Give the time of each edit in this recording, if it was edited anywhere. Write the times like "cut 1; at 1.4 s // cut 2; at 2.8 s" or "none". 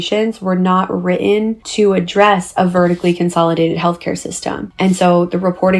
cut 1; at 1.6 s // cut 2; at 4.6 s